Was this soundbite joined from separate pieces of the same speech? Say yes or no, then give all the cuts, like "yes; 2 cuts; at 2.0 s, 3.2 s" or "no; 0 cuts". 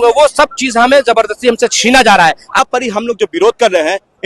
yes; 1 cut; at 2.5 s